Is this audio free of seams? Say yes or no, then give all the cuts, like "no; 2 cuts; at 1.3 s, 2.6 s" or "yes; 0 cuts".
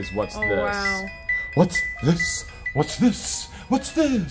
yes; 0 cuts